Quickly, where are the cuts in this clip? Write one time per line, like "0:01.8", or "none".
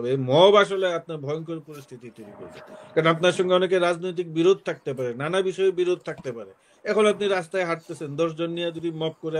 none